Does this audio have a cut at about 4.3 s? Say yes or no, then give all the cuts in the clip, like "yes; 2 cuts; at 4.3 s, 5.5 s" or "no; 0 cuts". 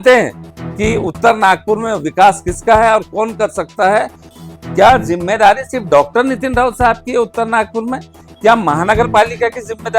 yes; 1 cut; at 4.3 s